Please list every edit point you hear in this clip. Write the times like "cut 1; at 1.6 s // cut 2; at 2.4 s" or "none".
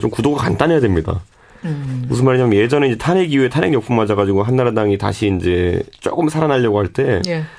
cut 1; at 3.6 s